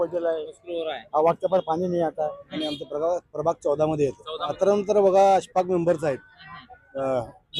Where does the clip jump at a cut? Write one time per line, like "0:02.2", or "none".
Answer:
0:02.4
0:04.6

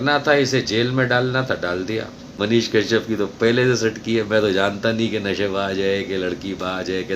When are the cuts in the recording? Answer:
0:02.2

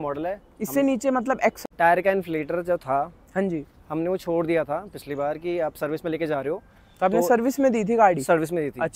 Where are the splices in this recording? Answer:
0:01.6

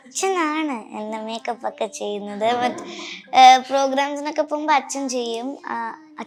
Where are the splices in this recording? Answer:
none

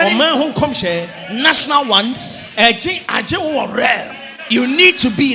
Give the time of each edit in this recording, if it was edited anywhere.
none

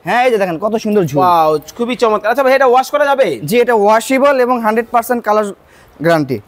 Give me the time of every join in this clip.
none

